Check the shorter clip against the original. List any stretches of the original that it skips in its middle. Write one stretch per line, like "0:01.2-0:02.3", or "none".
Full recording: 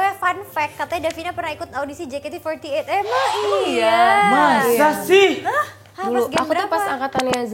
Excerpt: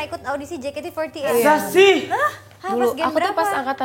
0:02.8-0:04.6